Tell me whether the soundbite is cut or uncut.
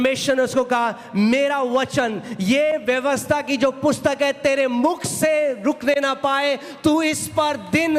uncut